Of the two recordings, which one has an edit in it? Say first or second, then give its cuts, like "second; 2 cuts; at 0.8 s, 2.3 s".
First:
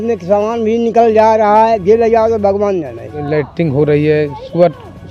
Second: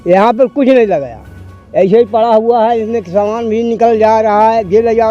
first; 1 cut; at 3.2 s